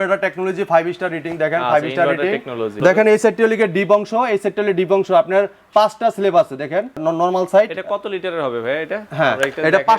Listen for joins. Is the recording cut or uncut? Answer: cut